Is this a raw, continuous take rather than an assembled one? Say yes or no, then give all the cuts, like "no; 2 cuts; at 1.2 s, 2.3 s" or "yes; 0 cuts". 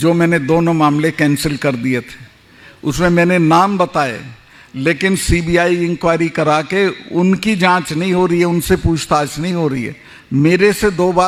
yes; 0 cuts